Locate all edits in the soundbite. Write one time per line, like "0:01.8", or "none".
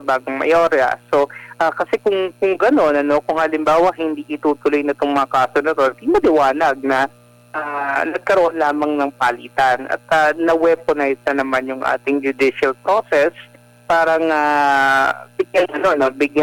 none

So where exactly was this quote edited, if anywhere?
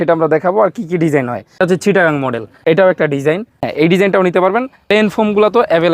0:01.6
0:02.5
0:03.7
0:04.8

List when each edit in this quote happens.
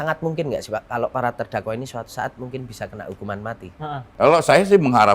0:04.0

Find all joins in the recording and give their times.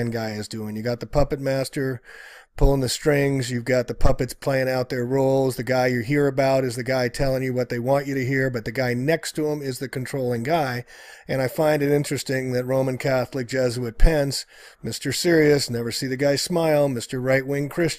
none

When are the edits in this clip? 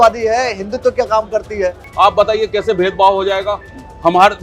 0:01.8

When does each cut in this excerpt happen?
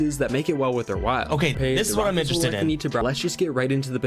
0:03.0

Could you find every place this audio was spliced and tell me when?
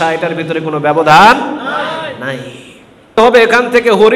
0:03.2

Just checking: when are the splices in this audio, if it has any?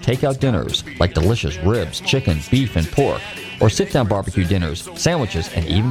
none

